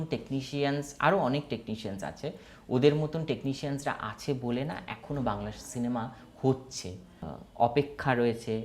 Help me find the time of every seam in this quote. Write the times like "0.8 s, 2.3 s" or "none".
7.3 s